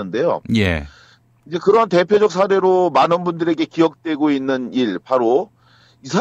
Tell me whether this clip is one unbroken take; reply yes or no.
no